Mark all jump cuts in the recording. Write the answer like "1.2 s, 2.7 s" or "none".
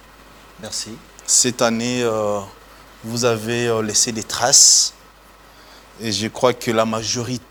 none